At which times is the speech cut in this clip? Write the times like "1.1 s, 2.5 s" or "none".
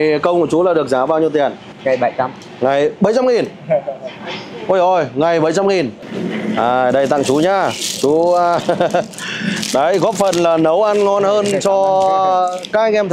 1.7 s, 6.0 s